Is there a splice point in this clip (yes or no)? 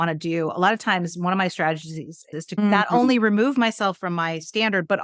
yes